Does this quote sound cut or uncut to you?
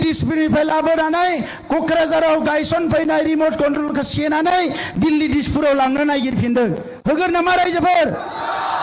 uncut